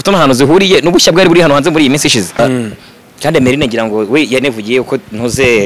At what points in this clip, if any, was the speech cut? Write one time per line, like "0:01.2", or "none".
0:02.4